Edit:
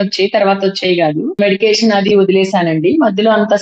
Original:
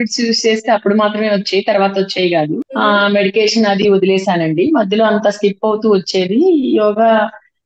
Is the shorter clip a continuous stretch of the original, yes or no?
no